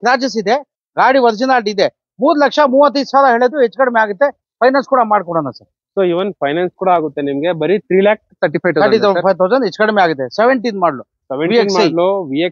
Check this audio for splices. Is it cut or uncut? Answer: uncut